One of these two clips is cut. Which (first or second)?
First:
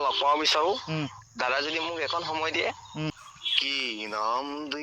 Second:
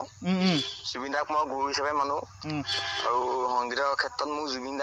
first